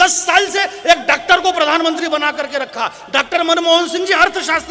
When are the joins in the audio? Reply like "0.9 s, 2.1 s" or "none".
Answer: none